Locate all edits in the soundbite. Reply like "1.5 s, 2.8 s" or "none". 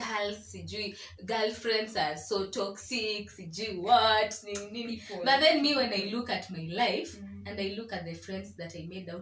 none